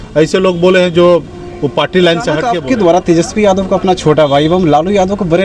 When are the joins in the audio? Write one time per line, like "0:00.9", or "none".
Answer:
0:02.4